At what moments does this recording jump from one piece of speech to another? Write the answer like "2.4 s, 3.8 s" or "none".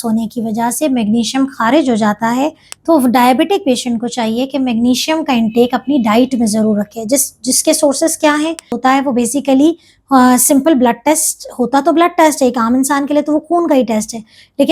8.8 s